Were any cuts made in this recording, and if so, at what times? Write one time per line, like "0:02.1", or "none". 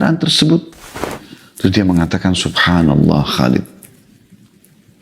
0:01.2

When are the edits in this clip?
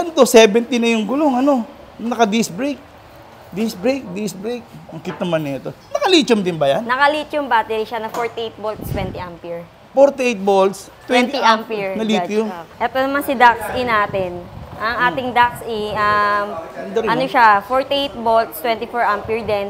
0:12.6

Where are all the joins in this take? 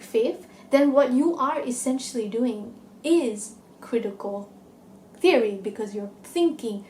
none

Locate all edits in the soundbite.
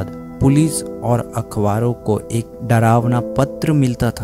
none

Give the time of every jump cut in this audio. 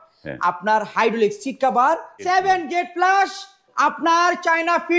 0:02.2

